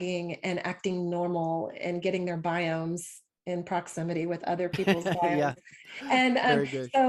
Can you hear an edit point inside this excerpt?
no; 0 cuts

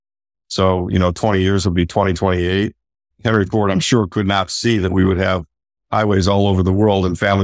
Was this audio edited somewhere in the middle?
yes; 1 cut; at 3.1 s

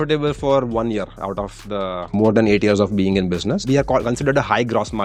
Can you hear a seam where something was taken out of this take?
no; 0 cuts

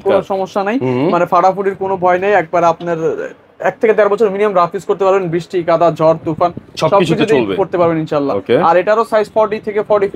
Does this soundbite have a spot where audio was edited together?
no; 0 cuts

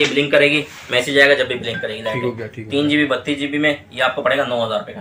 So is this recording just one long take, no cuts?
yes; 0 cuts

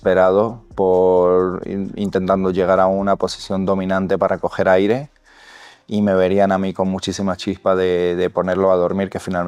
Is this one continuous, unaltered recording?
yes; 0 cuts

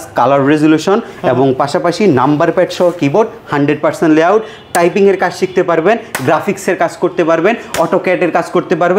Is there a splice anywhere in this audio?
no; 0 cuts

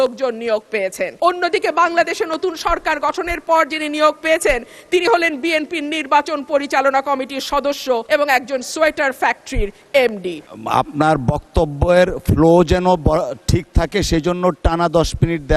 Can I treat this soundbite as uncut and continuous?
no; 3 cuts; at 1.1 s, 8.0 s, 10.5 s

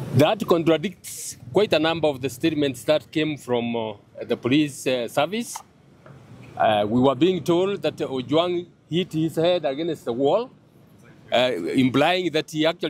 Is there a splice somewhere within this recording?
no; 0 cuts

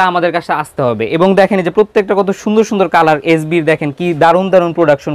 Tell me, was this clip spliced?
no; 0 cuts

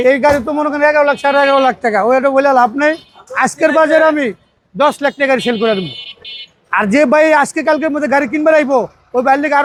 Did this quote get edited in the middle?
no; 0 cuts

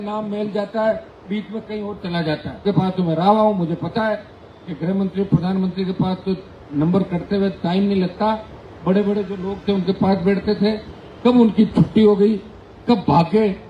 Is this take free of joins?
no; 1 cut; at 2.6 s

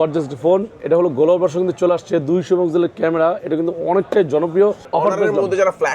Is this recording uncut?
no; 1 cut; at 4.8 s

